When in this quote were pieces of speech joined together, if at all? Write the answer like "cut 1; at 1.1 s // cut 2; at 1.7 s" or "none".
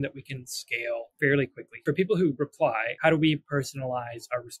cut 1; at 1.1 s // cut 2; at 1.7 s // cut 3; at 2.9 s